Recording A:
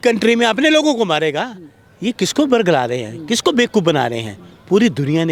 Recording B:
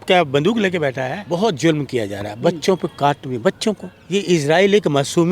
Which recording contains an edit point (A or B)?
B